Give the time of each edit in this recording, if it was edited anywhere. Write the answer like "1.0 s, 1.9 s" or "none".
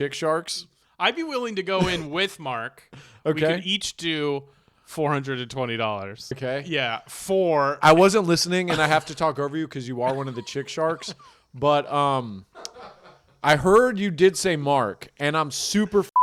6.4 s